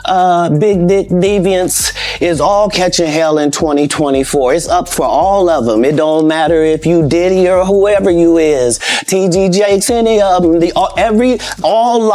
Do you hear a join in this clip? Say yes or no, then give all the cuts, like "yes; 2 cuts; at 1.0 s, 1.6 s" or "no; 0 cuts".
no; 0 cuts